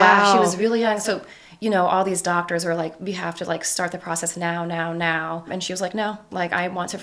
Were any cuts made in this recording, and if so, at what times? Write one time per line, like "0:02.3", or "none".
0:05.5

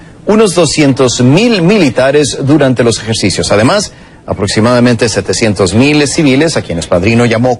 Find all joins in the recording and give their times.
0:02.5

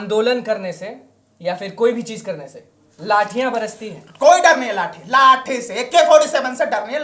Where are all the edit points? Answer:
none

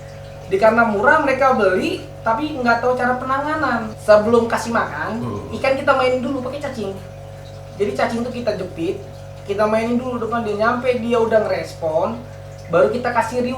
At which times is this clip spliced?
0:03.9

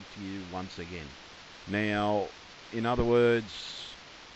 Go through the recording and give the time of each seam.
0:01.5

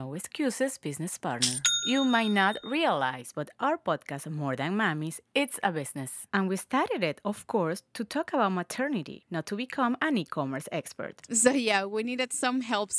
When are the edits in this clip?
none

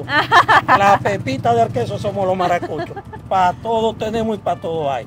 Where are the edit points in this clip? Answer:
none

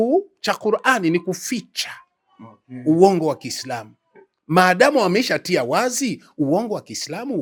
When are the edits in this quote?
none

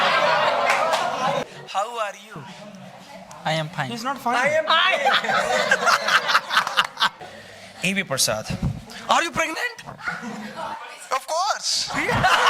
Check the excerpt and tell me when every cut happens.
0:01.4
0:07.2

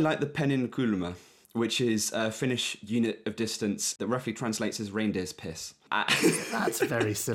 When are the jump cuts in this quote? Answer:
0:01.4
0:04.0
0:05.9

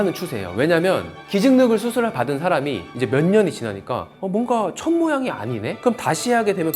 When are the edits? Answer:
0:01.1

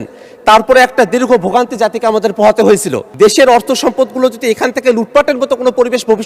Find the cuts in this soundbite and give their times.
0:03.0

